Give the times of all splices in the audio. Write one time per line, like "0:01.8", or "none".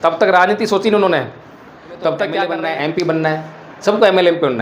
0:02.5